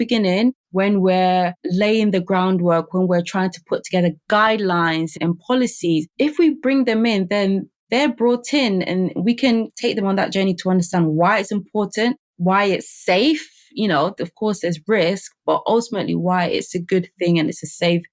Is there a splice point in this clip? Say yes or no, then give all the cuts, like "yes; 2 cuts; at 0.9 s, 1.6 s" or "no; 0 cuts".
yes; 2 cuts; at 5.2 s, 9.7 s